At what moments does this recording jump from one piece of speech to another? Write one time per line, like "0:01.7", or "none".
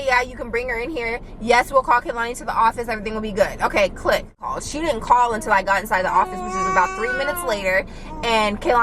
0:04.5